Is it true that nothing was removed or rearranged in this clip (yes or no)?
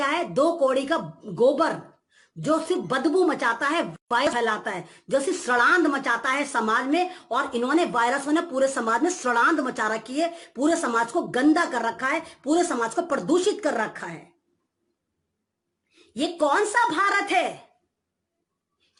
yes